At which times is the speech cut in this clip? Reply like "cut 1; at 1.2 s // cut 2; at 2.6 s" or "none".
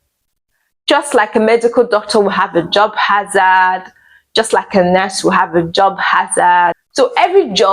cut 1; at 6.8 s